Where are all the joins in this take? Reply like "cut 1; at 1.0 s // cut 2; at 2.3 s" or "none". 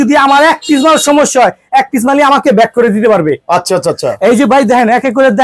none